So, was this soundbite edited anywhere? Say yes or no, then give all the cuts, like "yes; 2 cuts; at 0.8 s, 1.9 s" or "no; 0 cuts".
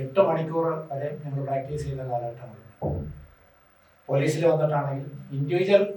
no; 0 cuts